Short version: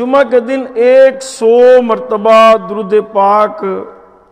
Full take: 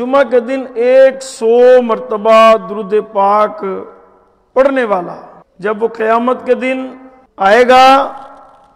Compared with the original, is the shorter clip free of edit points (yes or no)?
yes